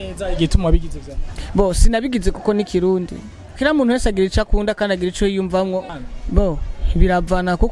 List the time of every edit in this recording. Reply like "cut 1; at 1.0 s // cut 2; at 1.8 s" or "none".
cut 1; at 3.6 s // cut 2; at 5.9 s

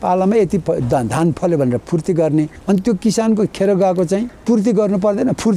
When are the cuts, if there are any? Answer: cut 1; at 2.6 s // cut 2; at 4.3 s

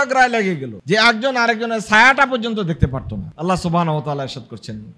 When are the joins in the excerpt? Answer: none

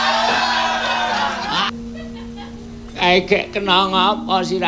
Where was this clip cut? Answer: cut 1; at 1.6 s

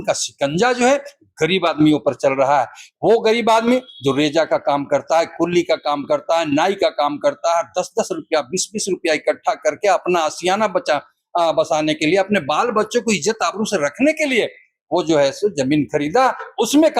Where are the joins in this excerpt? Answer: none

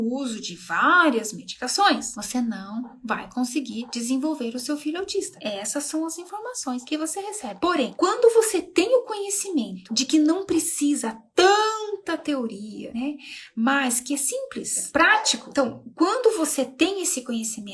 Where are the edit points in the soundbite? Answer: cut 1; at 7.4 s // cut 2; at 15.4 s

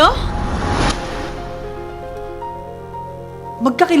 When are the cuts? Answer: none

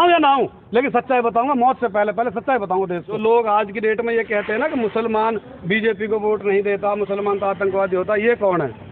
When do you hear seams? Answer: cut 1; at 3.1 s

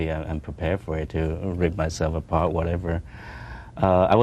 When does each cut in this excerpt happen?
cut 1; at 2.8 s

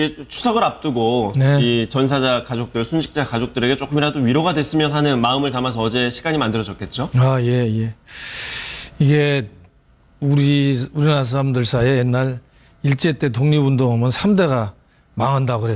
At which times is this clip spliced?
cut 1; at 6.9 s

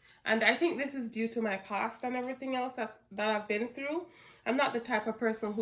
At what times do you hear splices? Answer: none

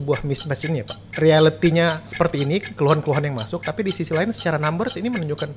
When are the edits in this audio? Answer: cut 1; at 1.0 s // cut 2; at 2.1 s

